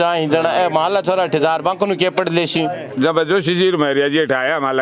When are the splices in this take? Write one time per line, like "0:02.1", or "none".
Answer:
0:02.8